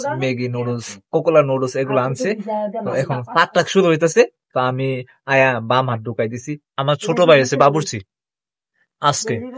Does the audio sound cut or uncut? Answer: cut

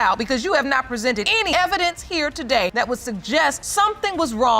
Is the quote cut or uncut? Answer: cut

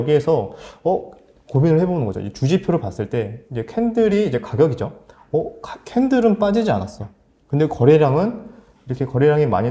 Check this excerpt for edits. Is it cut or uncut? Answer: uncut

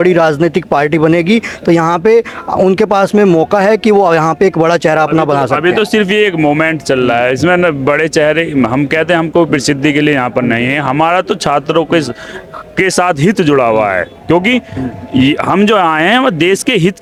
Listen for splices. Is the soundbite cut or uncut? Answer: uncut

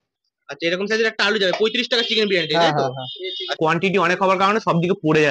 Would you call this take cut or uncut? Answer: cut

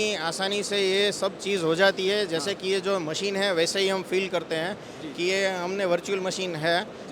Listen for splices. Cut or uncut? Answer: uncut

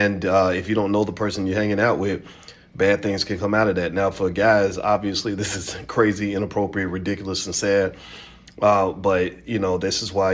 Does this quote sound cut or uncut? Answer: uncut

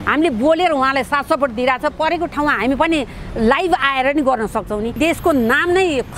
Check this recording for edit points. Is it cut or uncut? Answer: cut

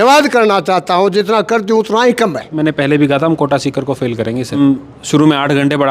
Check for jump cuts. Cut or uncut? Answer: cut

